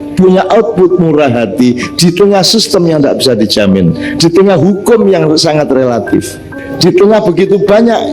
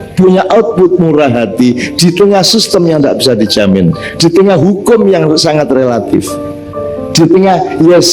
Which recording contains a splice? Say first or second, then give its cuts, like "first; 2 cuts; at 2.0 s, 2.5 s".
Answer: first; 1 cut; at 6.6 s